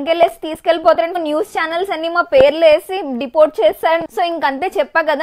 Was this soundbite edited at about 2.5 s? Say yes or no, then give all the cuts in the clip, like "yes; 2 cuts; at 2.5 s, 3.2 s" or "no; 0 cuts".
no; 2 cuts; at 1.2 s, 4.0 s